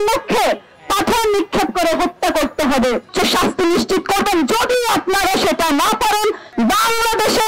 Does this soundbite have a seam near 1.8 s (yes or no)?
no